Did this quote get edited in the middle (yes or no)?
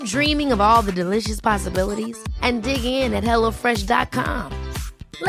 no